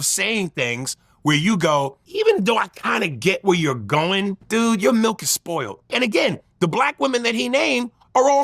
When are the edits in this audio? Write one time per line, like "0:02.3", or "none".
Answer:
0:02.0
0:04.4
0:05.9